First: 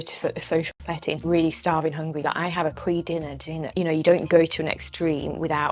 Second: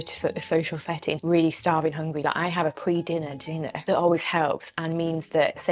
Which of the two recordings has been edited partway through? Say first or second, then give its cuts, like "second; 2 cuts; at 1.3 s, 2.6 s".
first; 1 cut; at 3.7 s